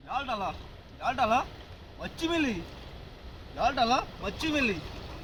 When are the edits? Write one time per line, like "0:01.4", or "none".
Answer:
none